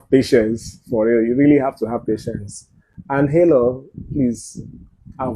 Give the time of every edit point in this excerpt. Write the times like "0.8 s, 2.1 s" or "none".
none